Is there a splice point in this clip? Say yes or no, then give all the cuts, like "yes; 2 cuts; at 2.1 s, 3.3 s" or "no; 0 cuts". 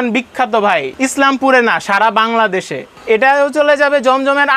yes; 2 cuts; at 0.9 s, 2.9 s